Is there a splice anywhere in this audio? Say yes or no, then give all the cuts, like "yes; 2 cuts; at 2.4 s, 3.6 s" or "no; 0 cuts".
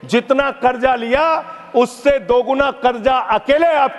no; 0 cuts